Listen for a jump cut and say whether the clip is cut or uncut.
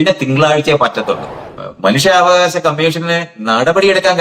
cut